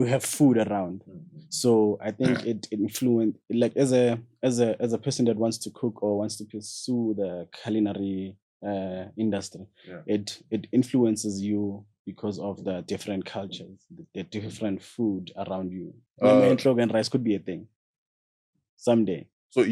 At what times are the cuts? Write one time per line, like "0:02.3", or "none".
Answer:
0:16.0